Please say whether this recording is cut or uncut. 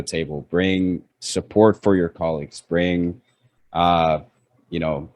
uncut